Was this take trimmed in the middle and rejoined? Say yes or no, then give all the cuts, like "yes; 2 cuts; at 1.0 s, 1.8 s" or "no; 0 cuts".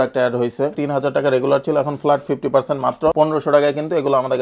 yes; 2 cuts; at 0.8 s, 3.1 s